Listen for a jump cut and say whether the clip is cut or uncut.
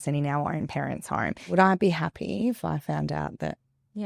cut